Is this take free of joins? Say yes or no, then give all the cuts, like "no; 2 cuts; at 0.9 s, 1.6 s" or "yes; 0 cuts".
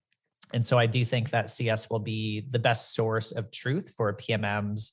yes; 0 cuts